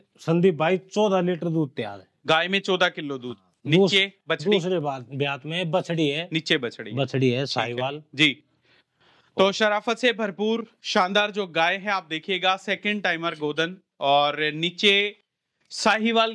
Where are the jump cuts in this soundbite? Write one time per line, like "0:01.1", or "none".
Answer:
none